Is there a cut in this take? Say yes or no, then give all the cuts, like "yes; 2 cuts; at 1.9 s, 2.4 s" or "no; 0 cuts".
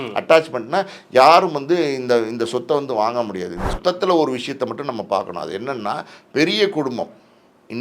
yes; 1 cut; at 3.7 s